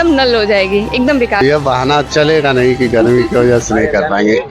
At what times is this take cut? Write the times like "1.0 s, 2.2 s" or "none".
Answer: 1.4 s